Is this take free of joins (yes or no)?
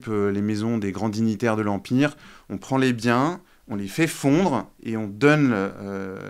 yes